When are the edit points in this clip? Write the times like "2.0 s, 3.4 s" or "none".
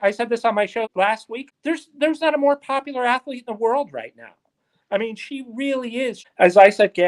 1.0 s, 6.2 s